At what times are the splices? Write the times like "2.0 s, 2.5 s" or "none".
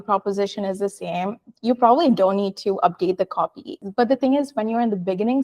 3.8 s

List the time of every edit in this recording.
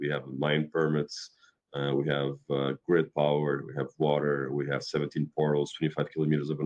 none

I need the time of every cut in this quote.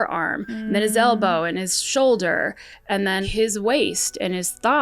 3.3 s

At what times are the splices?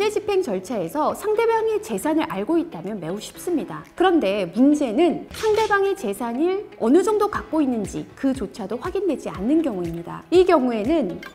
none

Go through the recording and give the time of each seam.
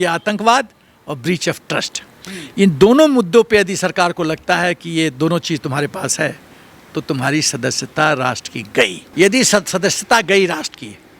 9.0 s

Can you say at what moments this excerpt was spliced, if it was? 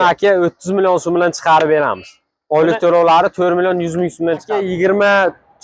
4.6 s

